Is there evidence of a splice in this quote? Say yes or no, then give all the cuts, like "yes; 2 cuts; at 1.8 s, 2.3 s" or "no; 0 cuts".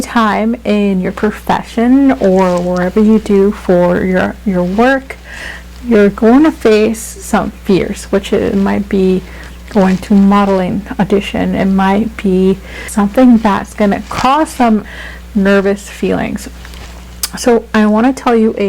yes; 2 cuts; at 12.9 s, 14.9 s